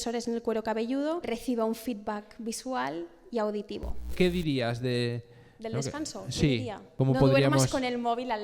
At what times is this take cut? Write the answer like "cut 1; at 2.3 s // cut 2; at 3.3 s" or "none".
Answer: cut 1; at 1.3 s // cut 2; at 4.1 s // cut 3; at 6.8 s